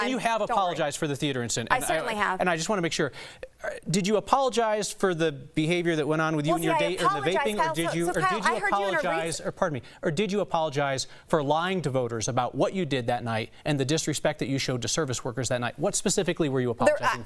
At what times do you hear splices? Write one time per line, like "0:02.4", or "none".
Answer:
none